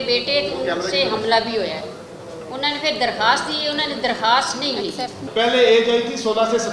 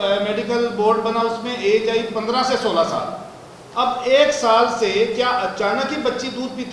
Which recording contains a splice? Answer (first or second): first